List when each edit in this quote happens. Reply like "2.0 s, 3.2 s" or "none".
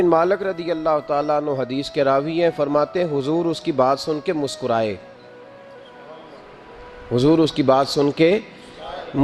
none